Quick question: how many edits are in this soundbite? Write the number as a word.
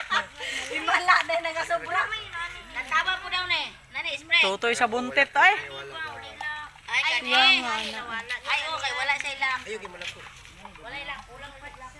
zero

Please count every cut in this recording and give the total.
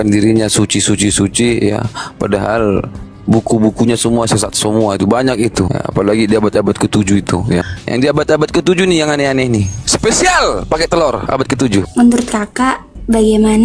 four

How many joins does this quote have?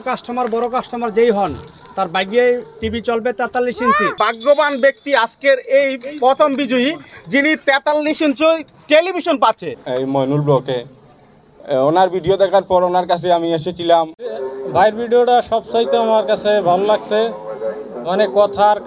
three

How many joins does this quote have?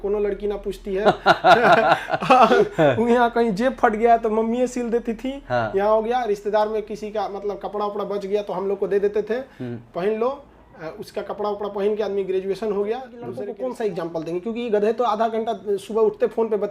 one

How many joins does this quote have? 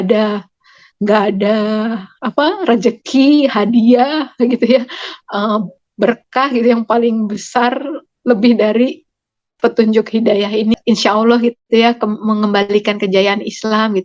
one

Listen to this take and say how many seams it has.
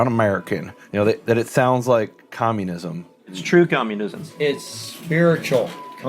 one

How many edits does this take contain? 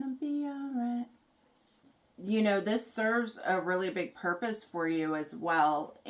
one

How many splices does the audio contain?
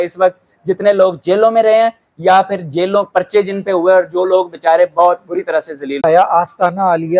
one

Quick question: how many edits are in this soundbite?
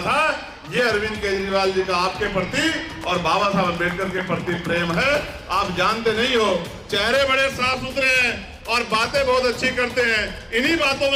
zero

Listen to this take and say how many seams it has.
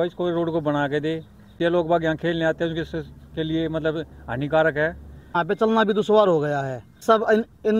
three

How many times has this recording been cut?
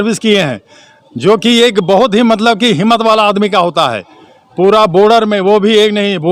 zero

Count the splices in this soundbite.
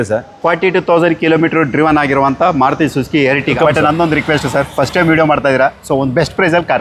one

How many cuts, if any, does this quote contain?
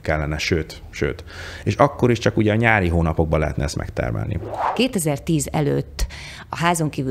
one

